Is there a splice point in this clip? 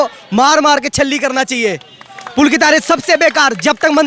no; 0 cuts

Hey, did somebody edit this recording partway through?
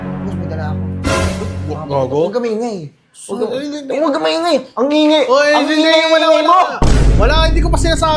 no; 0 cuts

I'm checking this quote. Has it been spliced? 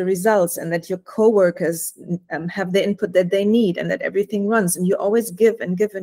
no; 0 cuts

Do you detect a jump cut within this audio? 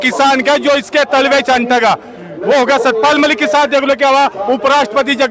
no; 0 cuts

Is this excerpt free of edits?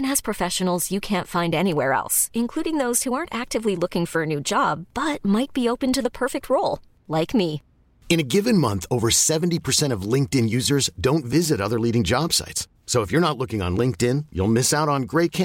yes; 0 cuts

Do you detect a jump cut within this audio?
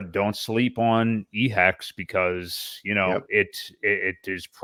no; 0 cuts

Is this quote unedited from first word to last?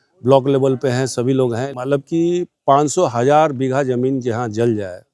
no; 1 cut; at 1.6 s

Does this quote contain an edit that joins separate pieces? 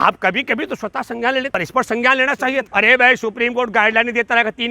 yes; 2 cuts; at 1.5 s, 2.7 s

